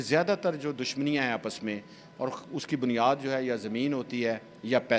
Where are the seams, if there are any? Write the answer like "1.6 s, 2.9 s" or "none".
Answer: none